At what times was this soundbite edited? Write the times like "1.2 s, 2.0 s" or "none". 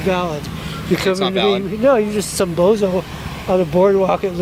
none